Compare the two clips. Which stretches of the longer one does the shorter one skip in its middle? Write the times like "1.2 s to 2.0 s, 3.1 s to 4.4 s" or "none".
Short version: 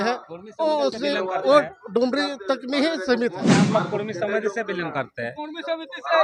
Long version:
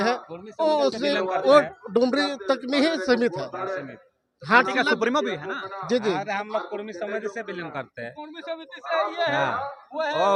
3.6 s to 6.4 s